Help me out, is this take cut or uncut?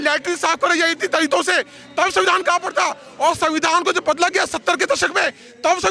uncut